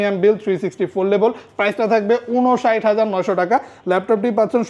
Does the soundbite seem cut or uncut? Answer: uncut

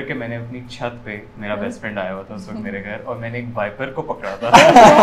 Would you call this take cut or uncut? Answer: uncut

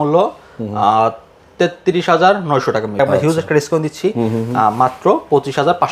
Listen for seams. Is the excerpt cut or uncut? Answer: cut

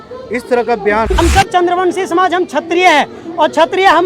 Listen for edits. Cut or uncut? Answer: cut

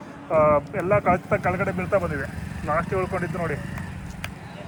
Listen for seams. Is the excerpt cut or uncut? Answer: uncut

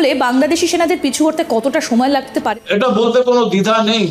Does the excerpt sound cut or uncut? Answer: cut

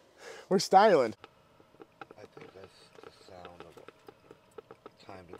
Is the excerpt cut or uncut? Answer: cut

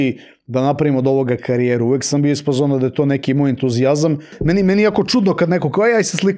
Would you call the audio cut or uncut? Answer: cut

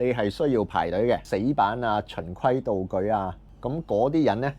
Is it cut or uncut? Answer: cut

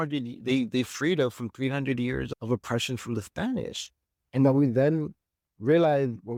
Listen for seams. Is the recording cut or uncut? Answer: uncut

